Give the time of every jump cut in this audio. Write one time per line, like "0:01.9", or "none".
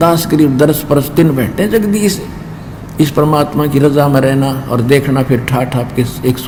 none